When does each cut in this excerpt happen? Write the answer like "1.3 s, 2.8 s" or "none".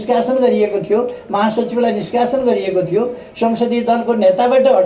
none